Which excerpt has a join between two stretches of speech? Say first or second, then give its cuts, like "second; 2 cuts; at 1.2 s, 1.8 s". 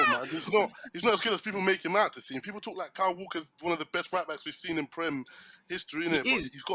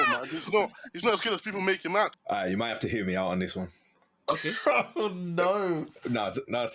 second; 1 cut; at 2.2 s